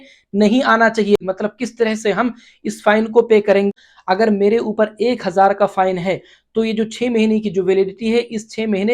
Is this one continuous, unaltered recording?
no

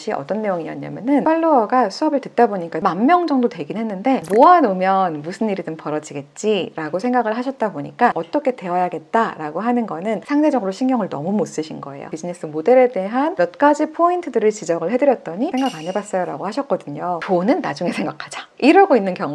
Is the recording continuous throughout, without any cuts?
no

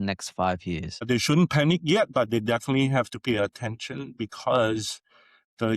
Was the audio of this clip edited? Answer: yes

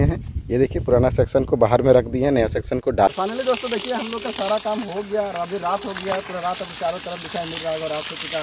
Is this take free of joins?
no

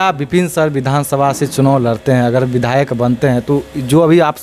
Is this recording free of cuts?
yes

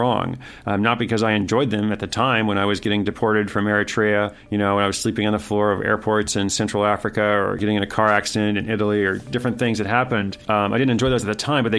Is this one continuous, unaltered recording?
no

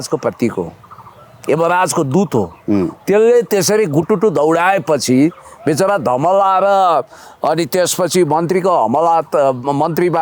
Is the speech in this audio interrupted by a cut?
no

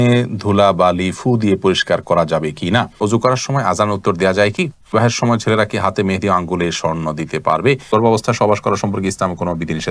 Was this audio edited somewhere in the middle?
yes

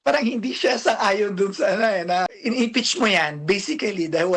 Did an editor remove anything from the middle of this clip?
yes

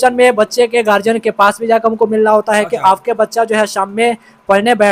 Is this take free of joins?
yes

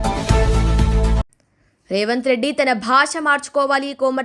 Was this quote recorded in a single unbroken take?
yes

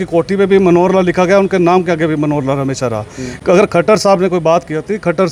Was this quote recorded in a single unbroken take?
yes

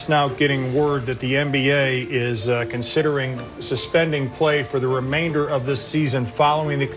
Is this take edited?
no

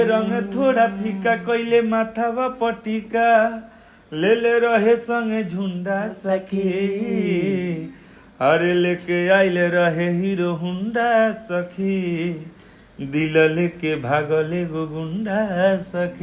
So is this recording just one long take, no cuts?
yes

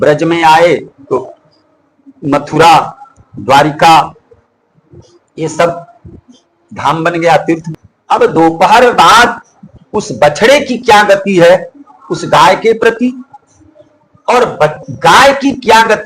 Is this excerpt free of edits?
no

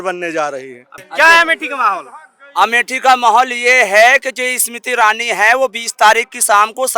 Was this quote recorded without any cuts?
no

